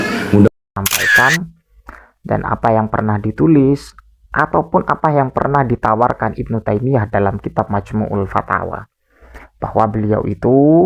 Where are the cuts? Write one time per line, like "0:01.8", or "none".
0:01.0